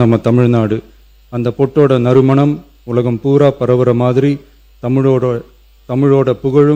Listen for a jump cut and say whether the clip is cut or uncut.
uncut